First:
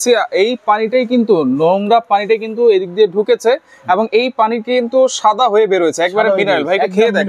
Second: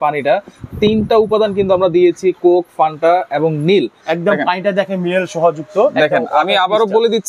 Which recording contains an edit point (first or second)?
second